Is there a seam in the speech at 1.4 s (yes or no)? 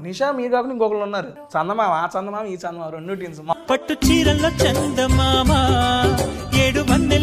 yes